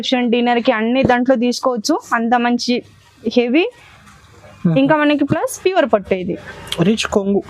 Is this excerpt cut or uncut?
uncut